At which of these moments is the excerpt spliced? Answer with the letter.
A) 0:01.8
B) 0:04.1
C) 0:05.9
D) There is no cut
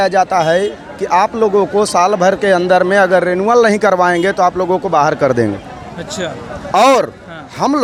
D